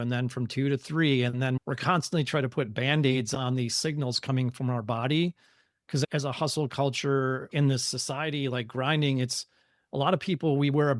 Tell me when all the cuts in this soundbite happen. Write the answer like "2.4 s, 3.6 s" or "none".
none